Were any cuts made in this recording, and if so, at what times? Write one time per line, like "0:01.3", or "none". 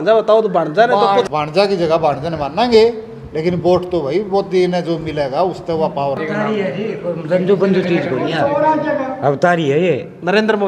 0:01.3
0:06.2